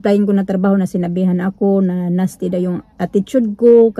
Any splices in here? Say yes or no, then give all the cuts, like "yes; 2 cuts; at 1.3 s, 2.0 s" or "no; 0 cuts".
no; 0 cuts